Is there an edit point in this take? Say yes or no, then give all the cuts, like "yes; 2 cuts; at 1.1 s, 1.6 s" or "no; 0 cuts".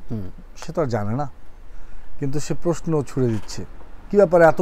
no; 0 cuts